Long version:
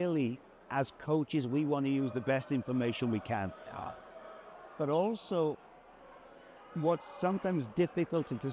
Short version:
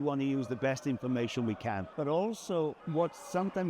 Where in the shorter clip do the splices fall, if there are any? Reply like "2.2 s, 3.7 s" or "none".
1.9 s, 2.8 s